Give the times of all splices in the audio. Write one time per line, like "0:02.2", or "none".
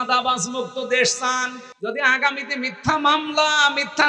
0:01.6